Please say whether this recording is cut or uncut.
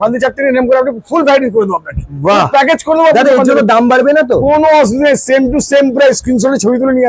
uncut